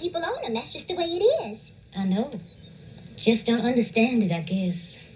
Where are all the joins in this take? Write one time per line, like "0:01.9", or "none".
0:02.2

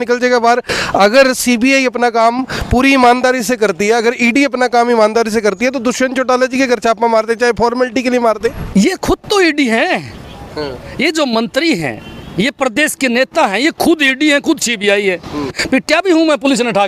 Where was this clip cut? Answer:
0:08.6
0:15.6

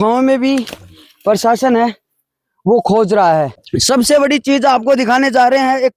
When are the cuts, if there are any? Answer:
0:03.7

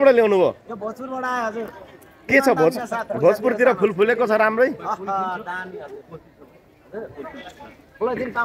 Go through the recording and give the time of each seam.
none

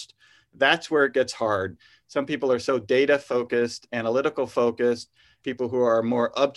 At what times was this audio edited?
0:01.8
0:05.4

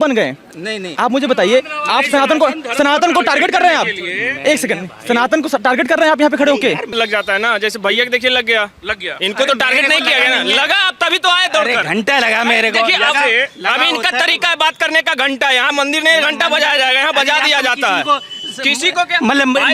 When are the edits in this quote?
0:06.9

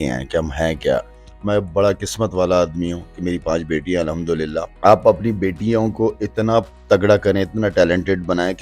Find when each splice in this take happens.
0:01.2
0:04.7

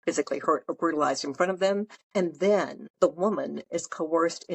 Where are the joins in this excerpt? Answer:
0:02.0
0:02.8

